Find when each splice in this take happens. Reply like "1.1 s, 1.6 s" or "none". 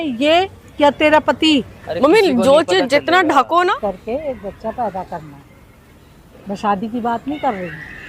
3.7 s